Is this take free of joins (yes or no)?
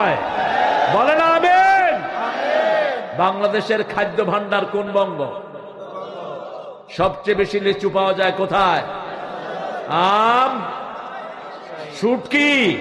yes